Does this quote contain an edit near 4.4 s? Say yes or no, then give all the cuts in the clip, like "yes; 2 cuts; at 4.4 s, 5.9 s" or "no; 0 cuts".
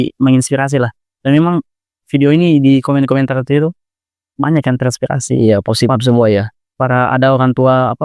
no; 0 cuts